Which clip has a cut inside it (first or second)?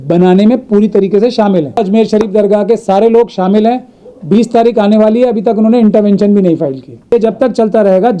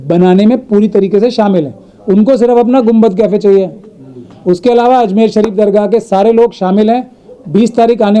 first